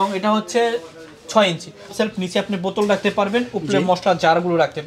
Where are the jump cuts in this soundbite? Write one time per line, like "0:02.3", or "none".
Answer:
0:01.9